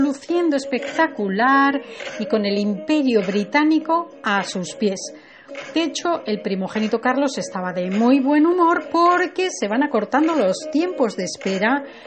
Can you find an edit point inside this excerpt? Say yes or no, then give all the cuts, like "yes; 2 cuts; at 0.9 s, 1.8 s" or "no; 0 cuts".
no; 0 cuts